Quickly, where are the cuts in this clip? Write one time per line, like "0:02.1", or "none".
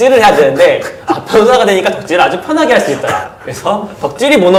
none